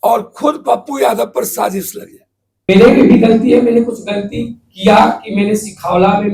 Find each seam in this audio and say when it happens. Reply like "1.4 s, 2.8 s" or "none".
2.7 s